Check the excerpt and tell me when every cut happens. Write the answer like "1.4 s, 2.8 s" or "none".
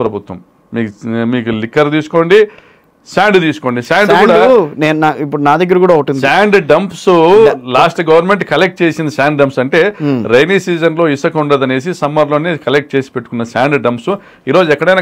none